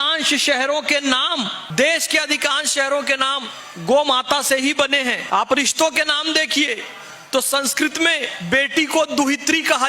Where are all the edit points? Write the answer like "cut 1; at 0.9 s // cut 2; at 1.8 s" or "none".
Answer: none

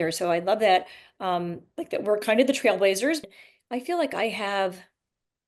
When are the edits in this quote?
cut 1; at 3.2 s

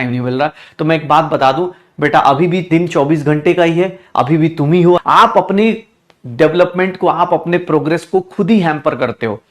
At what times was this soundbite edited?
cut 1; at 5.0 s

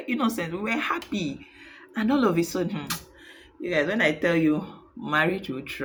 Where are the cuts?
none

